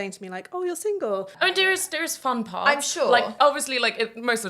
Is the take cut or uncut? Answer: cut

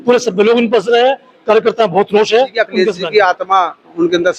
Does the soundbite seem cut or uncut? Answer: cut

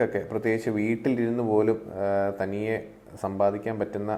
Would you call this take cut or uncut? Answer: uncut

